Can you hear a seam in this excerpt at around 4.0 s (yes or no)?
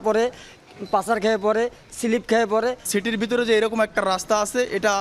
no